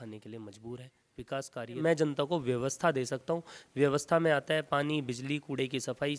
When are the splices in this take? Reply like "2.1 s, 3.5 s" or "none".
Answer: 1.8 s